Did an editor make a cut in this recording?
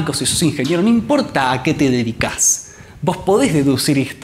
no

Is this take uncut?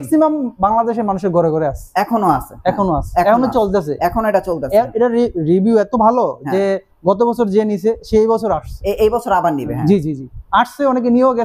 yes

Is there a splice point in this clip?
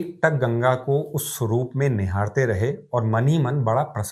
no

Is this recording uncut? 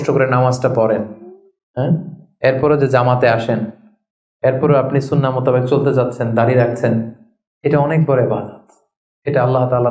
yes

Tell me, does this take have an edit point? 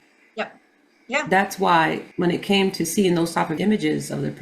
yes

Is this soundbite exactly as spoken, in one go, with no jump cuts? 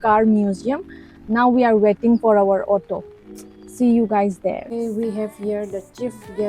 no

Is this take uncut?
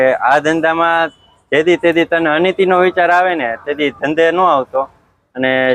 yes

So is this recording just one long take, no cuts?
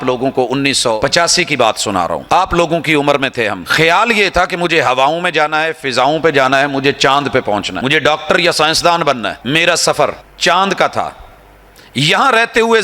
no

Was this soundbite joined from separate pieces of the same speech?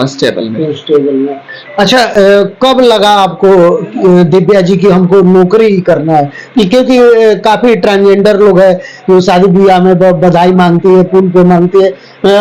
no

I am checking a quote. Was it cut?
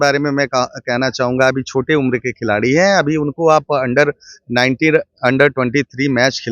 no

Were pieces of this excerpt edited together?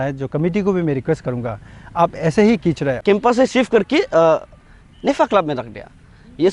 yes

